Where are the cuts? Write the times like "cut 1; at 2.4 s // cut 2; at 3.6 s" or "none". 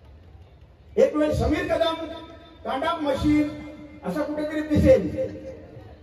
none